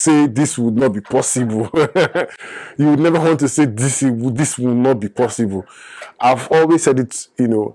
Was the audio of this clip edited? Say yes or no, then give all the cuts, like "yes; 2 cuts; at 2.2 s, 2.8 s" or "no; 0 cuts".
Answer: no; 0 cuts